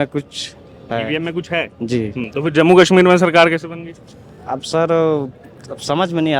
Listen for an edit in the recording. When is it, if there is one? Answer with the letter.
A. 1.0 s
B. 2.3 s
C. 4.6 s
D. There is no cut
D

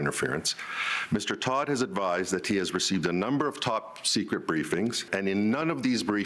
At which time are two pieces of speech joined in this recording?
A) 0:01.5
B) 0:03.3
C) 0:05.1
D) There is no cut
C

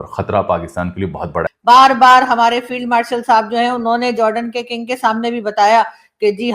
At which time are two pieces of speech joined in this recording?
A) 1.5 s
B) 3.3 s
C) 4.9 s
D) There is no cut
A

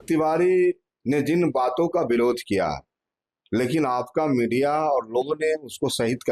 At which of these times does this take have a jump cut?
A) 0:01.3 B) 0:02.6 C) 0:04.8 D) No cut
D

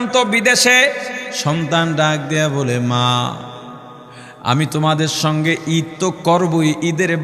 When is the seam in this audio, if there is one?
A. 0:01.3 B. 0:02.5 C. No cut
A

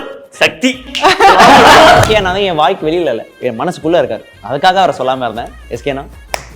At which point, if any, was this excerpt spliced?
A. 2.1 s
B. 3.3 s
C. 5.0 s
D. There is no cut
A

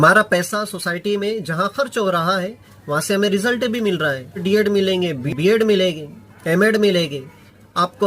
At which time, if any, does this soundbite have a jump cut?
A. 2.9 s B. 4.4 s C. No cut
B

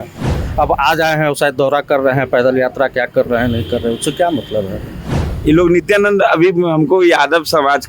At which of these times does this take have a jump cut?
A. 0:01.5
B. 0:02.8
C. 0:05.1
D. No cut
C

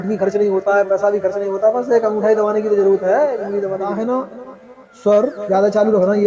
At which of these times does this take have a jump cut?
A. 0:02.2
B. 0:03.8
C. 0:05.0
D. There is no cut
B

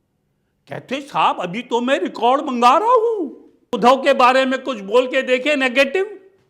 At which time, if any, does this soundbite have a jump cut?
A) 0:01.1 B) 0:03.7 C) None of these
B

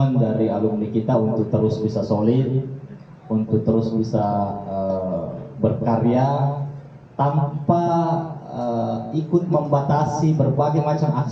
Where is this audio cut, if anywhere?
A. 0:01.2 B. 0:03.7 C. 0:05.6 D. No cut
D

